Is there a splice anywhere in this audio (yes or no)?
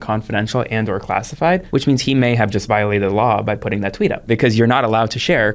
yes